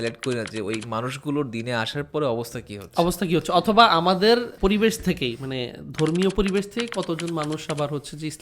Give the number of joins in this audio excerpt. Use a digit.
1